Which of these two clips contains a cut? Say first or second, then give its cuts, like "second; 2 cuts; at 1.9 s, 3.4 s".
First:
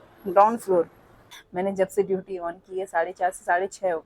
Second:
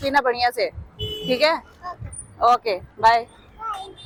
first; 1 cut; at 1.4 s